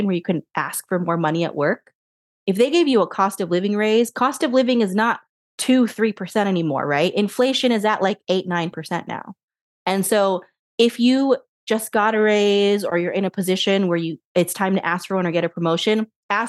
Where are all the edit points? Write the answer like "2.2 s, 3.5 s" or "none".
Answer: none

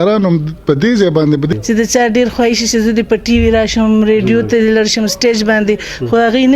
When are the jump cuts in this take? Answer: 1.5 s

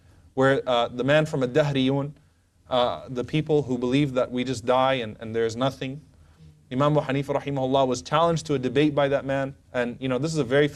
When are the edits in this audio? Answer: none

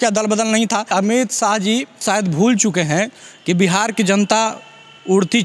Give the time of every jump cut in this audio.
0.9 s, 2.0 s

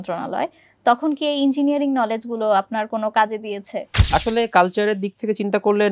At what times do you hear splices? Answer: 4.0 s

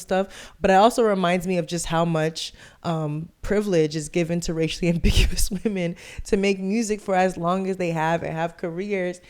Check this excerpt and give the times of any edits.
none

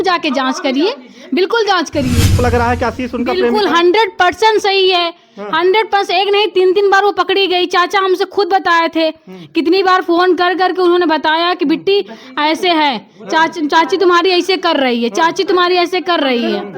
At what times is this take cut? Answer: 2.4 s

